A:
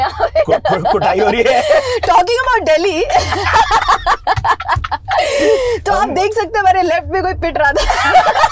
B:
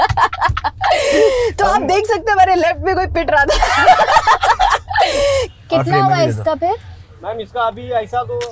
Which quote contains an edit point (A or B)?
B